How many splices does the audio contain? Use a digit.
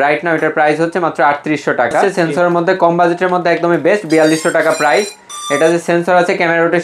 1